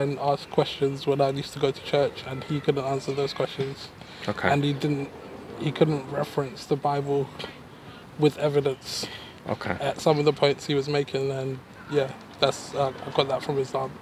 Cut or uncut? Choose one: uncut